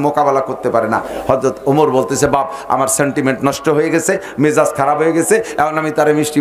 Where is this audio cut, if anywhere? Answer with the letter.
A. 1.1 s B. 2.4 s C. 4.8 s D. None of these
A